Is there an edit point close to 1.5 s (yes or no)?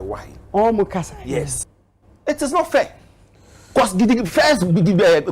yes